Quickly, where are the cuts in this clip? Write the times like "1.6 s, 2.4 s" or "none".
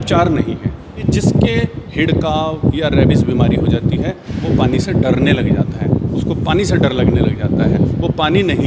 1.0 s